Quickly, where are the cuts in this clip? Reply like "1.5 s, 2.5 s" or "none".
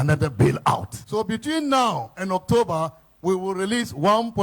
0.9 s